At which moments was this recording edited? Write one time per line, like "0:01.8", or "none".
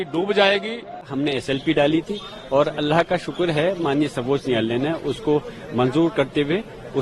0:01.1